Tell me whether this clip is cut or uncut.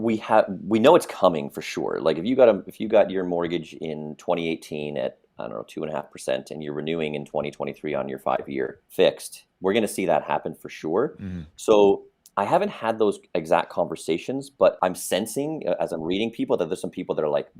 cut